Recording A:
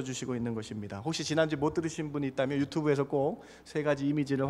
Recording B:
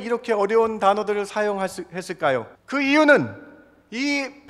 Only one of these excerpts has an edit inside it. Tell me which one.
B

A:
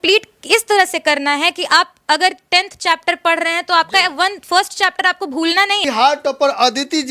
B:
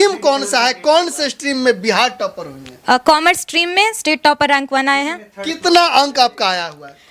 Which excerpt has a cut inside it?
A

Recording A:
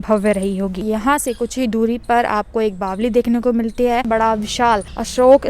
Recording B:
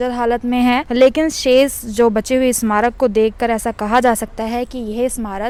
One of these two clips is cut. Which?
A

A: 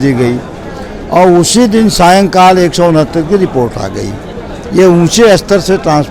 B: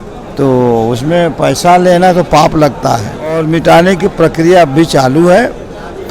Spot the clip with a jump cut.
B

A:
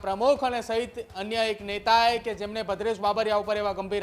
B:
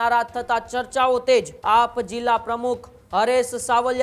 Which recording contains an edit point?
B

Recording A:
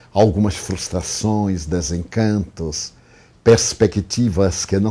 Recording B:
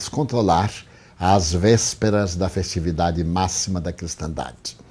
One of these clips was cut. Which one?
A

